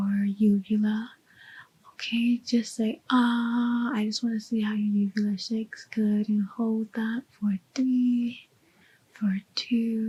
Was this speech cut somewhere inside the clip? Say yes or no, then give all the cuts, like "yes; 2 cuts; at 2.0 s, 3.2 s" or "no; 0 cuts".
no; 0 cuts